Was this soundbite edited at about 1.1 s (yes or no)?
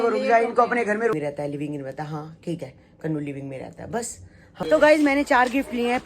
yes